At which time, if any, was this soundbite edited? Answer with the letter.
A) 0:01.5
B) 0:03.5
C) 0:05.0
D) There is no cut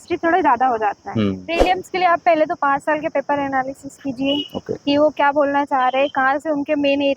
A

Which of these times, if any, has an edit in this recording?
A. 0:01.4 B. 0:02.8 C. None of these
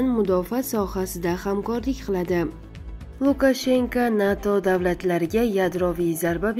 B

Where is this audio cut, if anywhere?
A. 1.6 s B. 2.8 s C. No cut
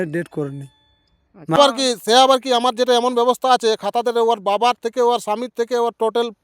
A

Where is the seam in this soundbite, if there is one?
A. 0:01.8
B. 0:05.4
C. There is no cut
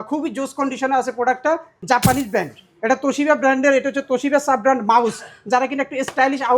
A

